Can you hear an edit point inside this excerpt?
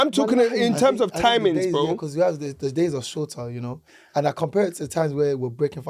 no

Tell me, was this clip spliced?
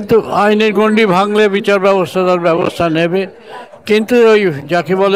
no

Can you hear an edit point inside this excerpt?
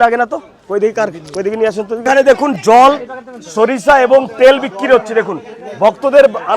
yes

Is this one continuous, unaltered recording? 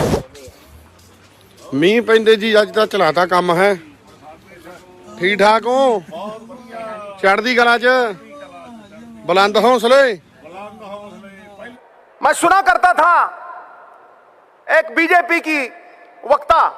no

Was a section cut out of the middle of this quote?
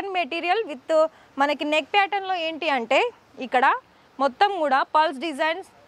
no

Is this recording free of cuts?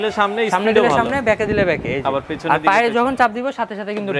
yes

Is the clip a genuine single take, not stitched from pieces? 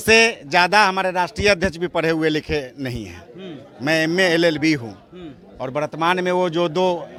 yes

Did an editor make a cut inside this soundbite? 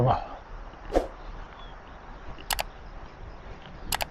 no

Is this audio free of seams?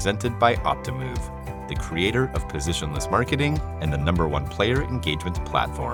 yes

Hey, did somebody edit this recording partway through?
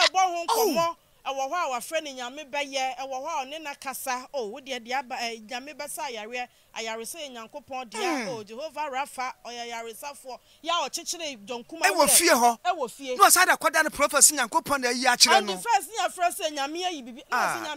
no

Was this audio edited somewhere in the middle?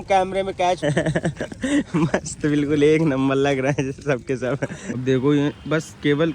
yes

